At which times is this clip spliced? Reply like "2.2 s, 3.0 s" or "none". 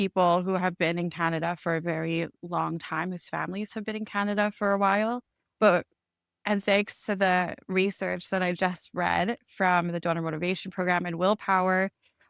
none

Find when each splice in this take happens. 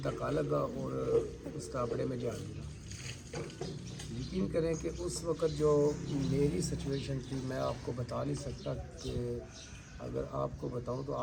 none

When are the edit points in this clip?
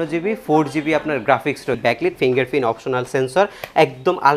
1.8 s

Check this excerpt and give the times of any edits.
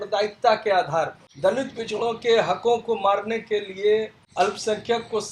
1.2 s, 4.2 s

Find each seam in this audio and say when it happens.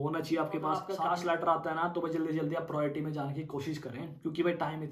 0.9 s

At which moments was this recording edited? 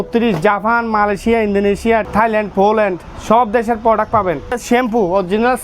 2.1 s, 4.6 s

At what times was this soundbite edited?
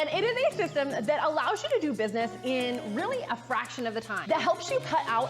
1.6 s

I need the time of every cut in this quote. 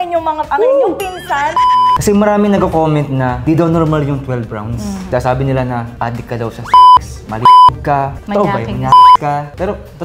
1.5 s, 3.4 s, 5.0 s, 5.9 s

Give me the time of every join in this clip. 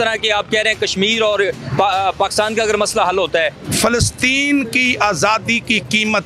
3.6 s

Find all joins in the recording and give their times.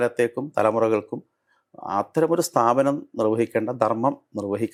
none

